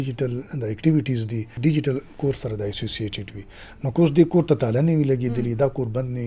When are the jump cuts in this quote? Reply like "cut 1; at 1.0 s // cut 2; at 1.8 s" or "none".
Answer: cut 1; at 1.6 s